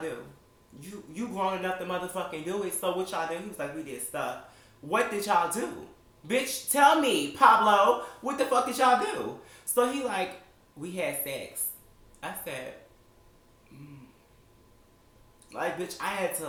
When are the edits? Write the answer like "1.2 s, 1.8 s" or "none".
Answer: none